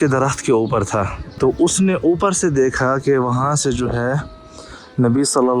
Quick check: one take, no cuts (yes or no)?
no